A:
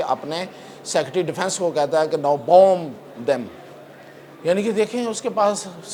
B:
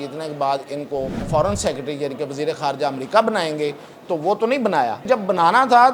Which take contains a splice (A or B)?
B